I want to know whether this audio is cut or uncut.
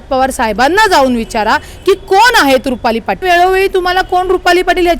cut